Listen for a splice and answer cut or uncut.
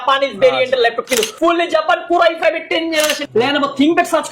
cut